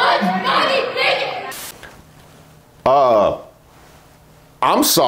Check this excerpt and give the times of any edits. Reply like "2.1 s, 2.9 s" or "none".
1.4 s